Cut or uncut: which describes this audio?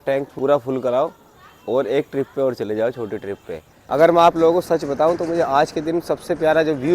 cut